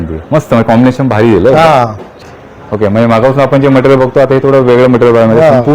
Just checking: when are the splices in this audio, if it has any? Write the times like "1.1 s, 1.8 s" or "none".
2.2 s